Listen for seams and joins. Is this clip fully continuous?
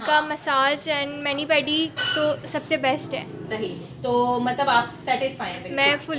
yes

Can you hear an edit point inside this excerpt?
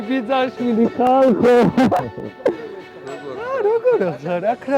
no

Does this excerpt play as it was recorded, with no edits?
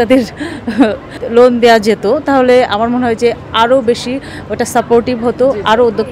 no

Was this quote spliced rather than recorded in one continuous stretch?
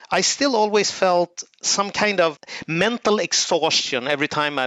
no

